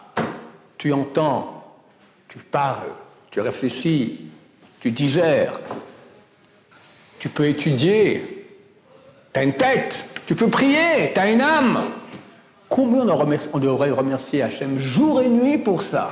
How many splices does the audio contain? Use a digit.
0